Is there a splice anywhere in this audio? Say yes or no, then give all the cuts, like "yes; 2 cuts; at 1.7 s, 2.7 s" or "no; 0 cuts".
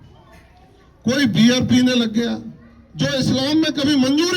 no; 0 cuts